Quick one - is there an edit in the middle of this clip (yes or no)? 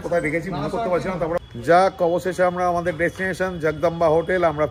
yes